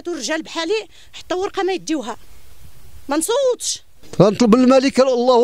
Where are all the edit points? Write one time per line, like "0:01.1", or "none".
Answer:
0:04.0